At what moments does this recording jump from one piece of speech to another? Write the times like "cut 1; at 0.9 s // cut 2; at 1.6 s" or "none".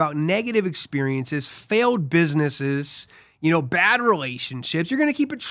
none